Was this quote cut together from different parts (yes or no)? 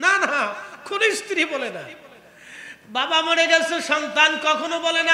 no